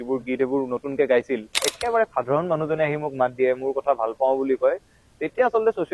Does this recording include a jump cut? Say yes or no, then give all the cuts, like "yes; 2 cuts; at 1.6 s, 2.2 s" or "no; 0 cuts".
yes; 1 cut; at 1.6 s